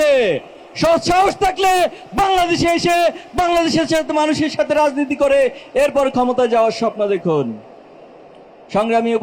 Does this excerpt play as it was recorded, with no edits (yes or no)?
yes